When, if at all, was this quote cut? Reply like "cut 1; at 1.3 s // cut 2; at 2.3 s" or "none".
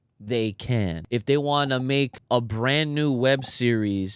cut 1; at 1.0 s // cut 2; at 2.2 s

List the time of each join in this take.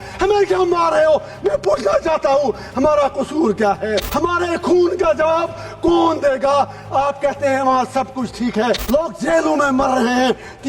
cut 1; at 4.1 s // cut 2; at 8.8 s

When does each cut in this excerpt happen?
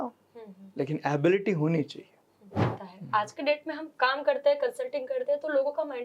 cut 1; at 2.8 s

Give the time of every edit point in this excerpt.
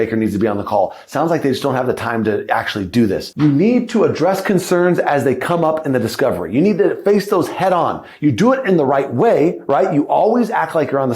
cut 1; at 3.3 s

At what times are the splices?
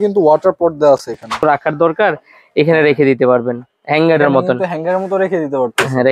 cut 1; at 1.4 s

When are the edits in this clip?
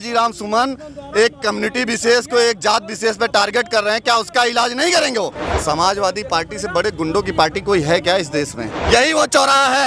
cut 1; at 5.3 s // cut 2; at 8.8 s

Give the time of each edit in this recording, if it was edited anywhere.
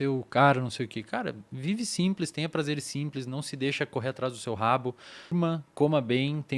cut 1; at 5.3 s

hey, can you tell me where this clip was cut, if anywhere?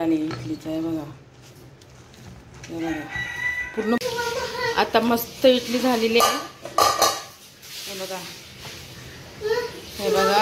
cut 1; at 4.0 s

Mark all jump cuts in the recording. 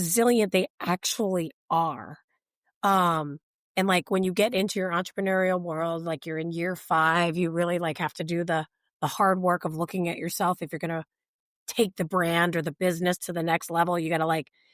none

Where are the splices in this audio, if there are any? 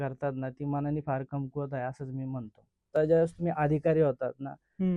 cut 1; at 2.9 s

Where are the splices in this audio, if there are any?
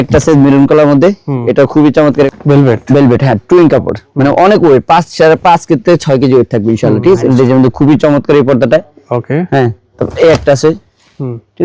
cut 1; at 2.3 s // cut 2; at 7.3 s

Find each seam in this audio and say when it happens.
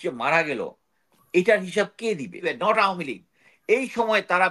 cut 1; at 2.5 s

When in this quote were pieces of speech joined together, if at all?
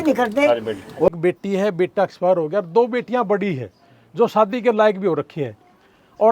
cut 1; at 1.1 s

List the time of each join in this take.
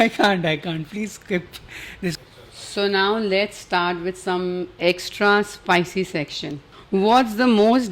cut 1; at 2.2 s // cut 2; at 6.7 s

